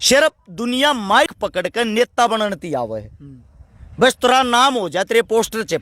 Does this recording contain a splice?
yes; 1 cut; at 1.3 s

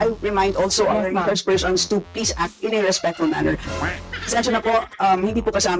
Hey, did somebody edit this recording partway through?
no; 0 cuts

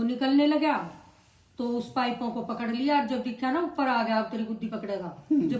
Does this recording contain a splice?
no; 0 cuts

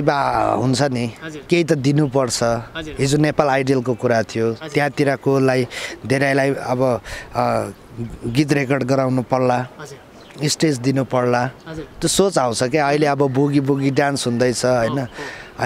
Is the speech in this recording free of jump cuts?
yes; 0 cuts

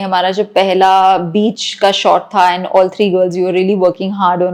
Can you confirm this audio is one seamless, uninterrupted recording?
yes; 0 cuts

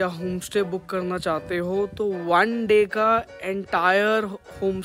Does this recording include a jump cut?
no; 0 cuts

